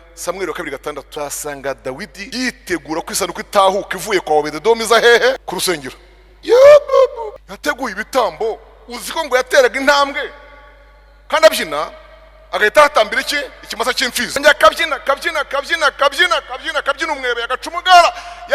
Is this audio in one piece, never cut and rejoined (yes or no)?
no